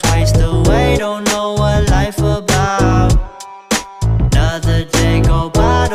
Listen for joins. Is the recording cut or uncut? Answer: uncut